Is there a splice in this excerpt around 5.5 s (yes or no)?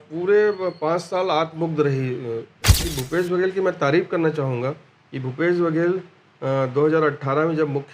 no